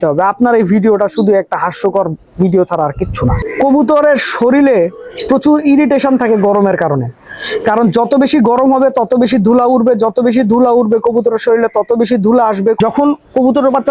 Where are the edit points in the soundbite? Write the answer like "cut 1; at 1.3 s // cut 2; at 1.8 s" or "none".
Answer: cut 1; at 3.4 s // cut 2; at 12.8 s